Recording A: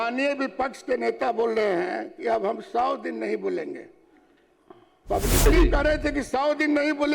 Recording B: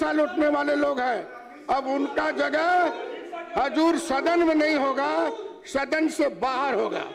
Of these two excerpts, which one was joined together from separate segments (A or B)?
A